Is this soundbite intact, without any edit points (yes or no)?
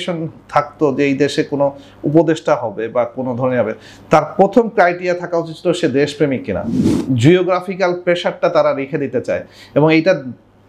no